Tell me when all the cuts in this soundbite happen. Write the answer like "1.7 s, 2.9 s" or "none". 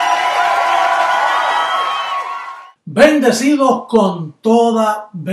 2.1 s